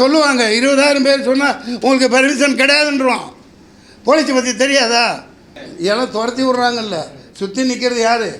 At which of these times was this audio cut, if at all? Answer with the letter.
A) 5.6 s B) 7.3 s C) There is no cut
A